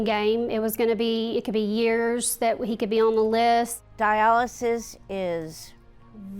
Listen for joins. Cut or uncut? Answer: cut